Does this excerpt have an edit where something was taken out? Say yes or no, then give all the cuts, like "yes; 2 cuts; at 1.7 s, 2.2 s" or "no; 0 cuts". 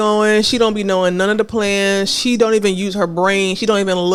no; 0 cuts